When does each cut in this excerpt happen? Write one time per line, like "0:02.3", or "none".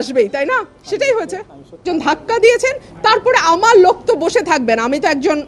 0:01.8